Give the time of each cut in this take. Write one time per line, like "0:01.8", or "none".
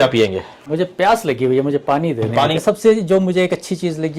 0:02.6